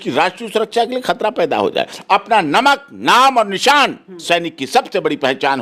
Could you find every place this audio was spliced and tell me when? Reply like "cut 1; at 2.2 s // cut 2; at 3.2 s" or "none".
cut 1; at 1.9 s

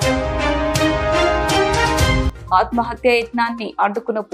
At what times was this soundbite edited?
cut 1; at 2.3 s

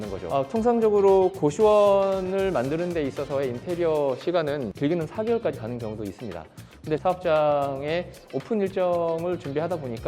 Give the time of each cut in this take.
cut 1; at 4.7 s // cut 2; at 7.0 s

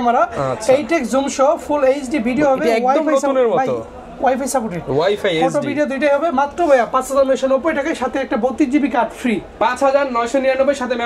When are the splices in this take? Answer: none

